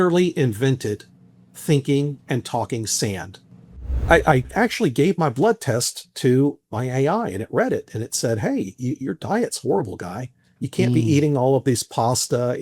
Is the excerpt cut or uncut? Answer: cut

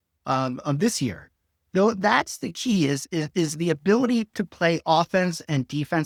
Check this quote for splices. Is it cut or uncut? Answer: uncut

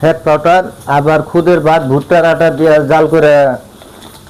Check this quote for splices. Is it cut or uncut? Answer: uncut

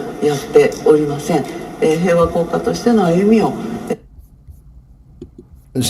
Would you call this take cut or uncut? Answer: uncut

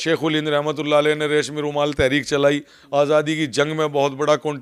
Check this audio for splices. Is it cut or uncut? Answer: uncut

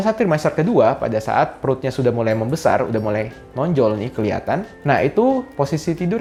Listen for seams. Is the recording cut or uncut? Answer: uncut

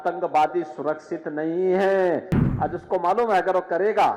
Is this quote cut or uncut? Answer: cut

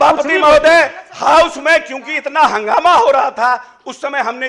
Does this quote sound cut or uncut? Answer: uncut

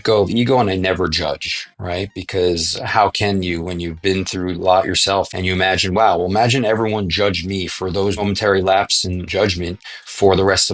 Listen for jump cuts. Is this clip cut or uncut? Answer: cut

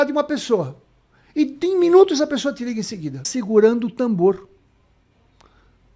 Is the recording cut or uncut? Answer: cut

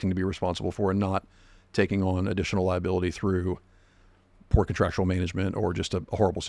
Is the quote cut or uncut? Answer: uncut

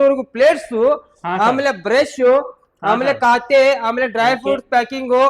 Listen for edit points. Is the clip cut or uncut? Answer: uncut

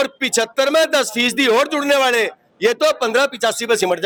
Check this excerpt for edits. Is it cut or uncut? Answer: uncut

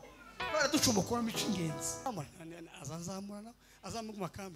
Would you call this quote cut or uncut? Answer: cut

